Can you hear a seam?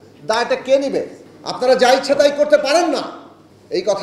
yes; 1 cut; at 1.2 s

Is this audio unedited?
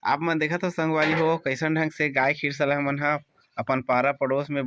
yes; 0 cuts

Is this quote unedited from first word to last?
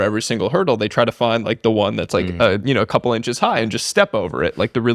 yes; 0 cuts

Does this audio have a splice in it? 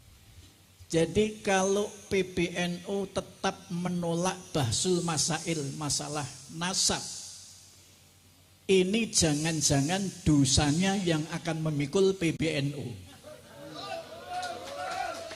no; 0 cuts

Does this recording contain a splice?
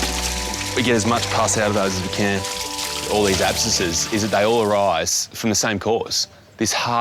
yes; 1 cut; at 3.1 s

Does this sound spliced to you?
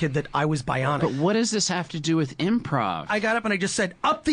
yes; 2 cuts; at 1.0 s, 3.1 s

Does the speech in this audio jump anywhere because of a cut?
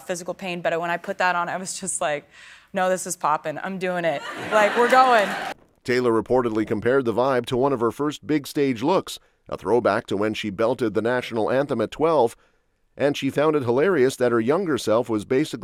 no; 0 cuts

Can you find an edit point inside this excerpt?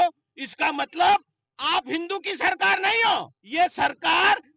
yes; 1 cut; at 3.4 s

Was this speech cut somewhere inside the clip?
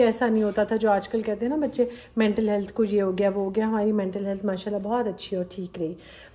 no; 0 cuts

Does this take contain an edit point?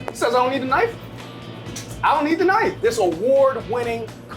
yes; 1 cut; at 2.8 s

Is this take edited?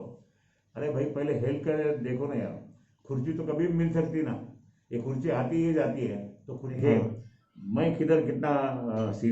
yes; 1 cut; at 6.7 s

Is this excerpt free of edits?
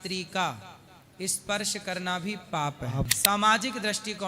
no; 1 cut; at 3.1 s

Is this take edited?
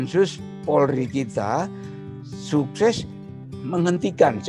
no; 0 cuts

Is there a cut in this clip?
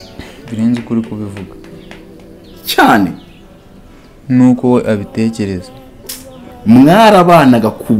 yes; 1 cut; at 6.5 s

